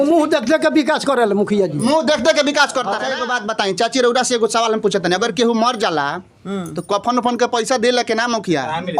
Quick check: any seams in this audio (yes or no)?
yes